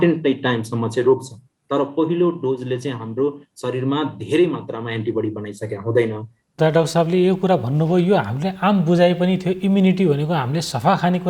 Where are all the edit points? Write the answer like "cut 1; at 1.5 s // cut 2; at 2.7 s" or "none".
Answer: cut 1; at 6.6 s